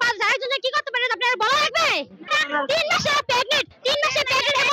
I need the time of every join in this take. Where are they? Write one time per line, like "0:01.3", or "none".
0:02.4